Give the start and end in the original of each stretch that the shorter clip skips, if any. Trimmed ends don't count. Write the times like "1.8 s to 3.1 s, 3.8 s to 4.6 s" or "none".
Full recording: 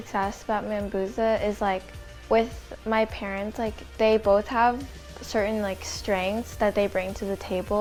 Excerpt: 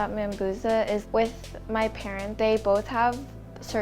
1.6 s to 2.2 s, 3.4 s to 3.9 s